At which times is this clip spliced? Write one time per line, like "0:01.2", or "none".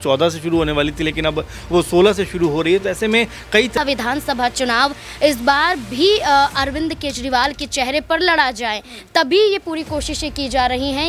0:03.8